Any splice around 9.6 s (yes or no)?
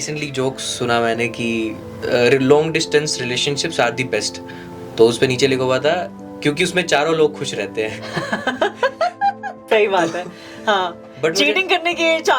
no